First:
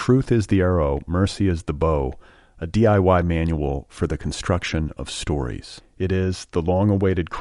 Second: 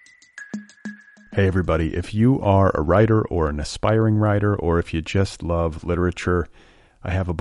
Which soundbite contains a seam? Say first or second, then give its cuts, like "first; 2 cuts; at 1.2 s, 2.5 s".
second; 1 cut; at 0.9 s